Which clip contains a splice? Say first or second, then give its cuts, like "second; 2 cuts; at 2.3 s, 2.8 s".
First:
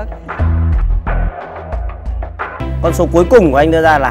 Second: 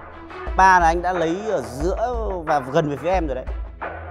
first; 1 cut; at 2.6 s